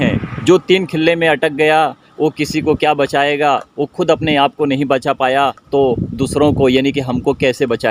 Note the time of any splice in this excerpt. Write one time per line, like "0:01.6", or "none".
0:05.6